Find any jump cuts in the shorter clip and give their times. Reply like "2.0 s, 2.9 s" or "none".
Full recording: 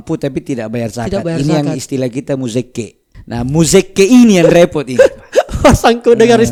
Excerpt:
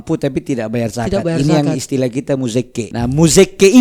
2.9 s